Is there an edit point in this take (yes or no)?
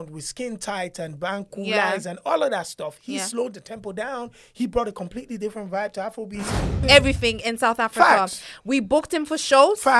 yes